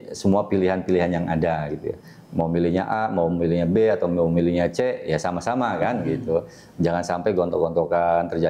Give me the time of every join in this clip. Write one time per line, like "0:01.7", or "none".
none